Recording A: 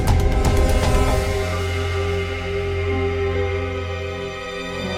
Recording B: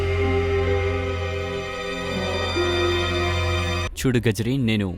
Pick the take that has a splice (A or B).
B